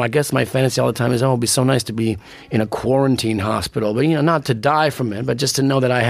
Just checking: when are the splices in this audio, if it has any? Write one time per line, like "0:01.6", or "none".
0:02.3